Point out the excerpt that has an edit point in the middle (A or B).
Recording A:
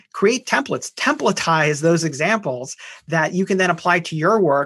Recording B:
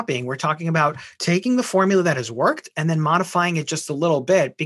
B